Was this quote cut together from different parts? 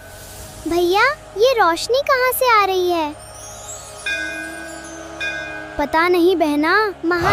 no; 0 cuts

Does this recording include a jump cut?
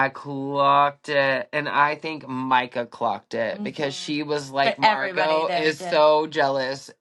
no; 0 cuts

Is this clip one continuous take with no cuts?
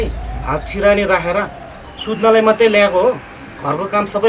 yes; 0 cuts

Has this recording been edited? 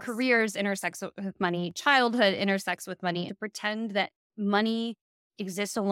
yes; 1 cut; at 3.3 s

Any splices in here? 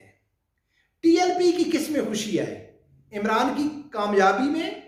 no; 0 cuts

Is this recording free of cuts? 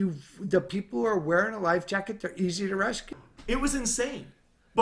no; 1 cut; at 3.1 s

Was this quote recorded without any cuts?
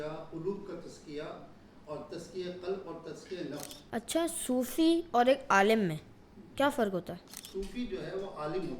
no; 2 cuts; at 3.7 s, 7.4 s

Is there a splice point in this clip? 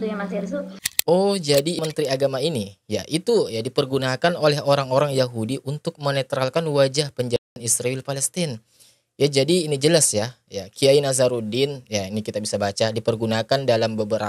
yes; 1 cut; at 1.8 s

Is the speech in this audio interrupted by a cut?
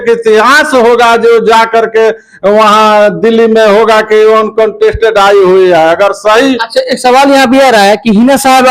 no; 0 cuts

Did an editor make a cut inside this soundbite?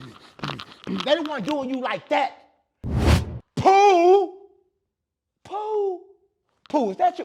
yes; 1 cut; at 3.1 s

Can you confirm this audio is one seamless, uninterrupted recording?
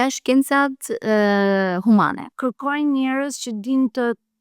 no; 1 cut; at 2.3 s

